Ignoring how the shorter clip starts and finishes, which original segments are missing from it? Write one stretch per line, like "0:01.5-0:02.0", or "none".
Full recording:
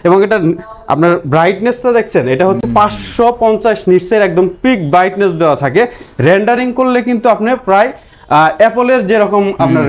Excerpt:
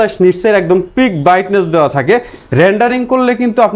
none